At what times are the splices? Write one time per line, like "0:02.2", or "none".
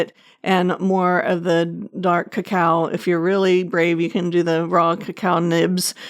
none